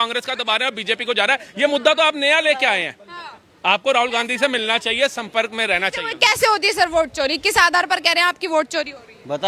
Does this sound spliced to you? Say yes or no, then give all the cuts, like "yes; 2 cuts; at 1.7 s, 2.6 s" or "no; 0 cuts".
no; 0 cuts